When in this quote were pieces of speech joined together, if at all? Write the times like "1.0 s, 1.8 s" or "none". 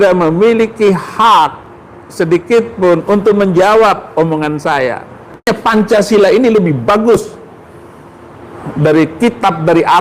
5.5 s